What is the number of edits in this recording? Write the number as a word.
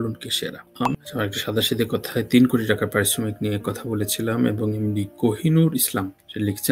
one